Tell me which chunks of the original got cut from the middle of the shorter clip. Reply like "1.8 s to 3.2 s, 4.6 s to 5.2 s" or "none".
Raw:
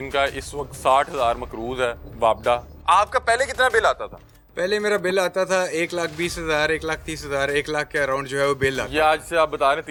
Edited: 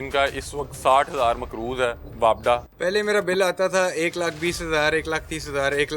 2.7 s to 4.5 s